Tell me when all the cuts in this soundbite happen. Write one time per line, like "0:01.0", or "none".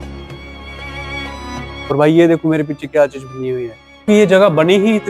0:03.9